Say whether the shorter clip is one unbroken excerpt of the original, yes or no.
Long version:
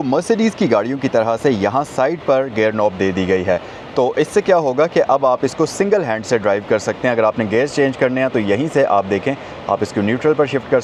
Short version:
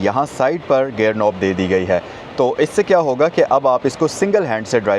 yes